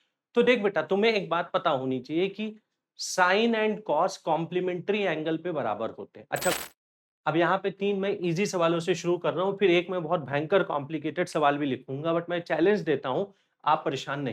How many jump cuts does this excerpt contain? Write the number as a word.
one